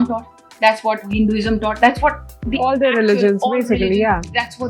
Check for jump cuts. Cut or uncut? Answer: cut